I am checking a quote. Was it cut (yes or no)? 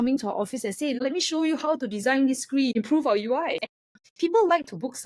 yes